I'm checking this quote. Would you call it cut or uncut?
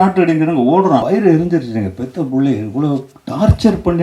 cut